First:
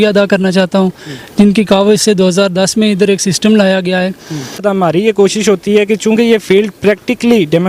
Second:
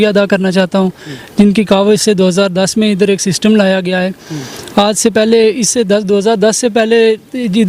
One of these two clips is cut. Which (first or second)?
first